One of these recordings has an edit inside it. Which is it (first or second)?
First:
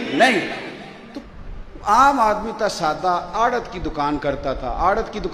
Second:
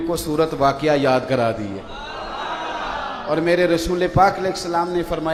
first